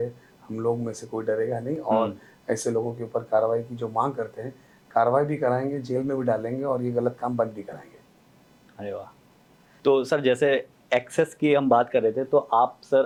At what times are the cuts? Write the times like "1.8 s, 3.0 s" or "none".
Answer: none